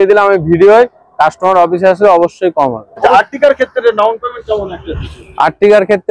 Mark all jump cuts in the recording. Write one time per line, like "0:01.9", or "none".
0:03.0